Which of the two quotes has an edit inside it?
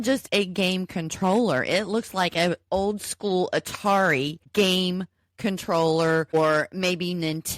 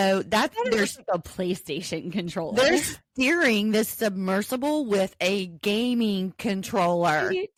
first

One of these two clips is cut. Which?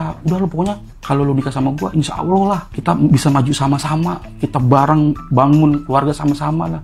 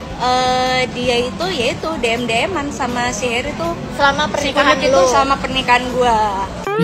first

